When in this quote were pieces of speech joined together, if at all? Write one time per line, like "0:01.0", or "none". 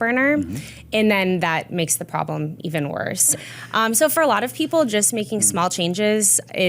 0:03.4

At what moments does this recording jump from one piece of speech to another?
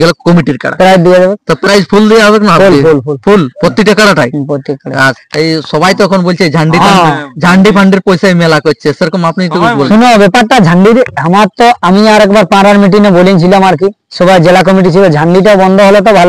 0:05.2

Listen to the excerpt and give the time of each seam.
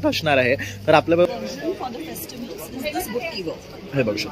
0:01.2

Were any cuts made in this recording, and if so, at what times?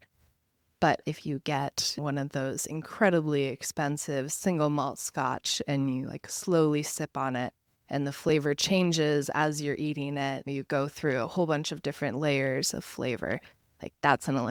none

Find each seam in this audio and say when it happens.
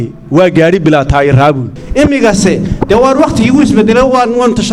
0:01.8

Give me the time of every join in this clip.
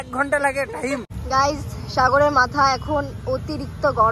0:01.1

